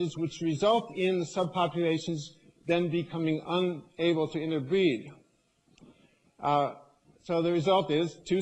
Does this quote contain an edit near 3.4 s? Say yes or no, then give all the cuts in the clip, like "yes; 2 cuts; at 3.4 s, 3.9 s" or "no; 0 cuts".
yes; 1 cut; at 3.4 s